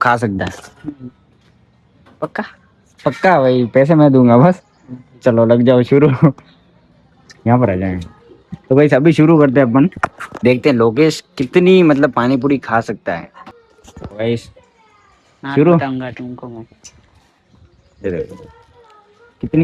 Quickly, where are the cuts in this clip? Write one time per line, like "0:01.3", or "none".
none